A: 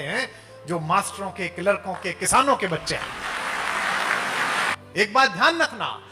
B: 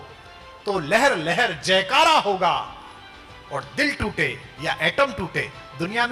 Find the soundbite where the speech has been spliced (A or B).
A